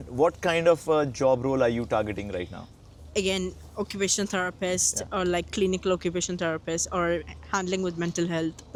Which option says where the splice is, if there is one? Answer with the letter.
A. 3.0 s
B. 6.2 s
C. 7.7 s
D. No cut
D